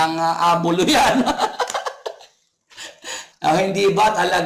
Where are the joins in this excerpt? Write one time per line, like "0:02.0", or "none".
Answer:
0:03.2